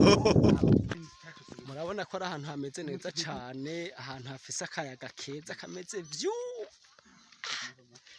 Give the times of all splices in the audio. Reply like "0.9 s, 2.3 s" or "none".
1.0 s